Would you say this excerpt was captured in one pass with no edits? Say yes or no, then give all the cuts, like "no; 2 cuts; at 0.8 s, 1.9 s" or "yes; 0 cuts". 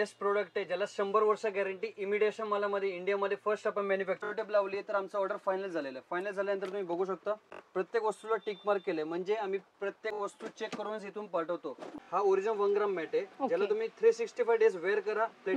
no; 3 cuts; at 4.2 s, 7.5 s, 12.0 s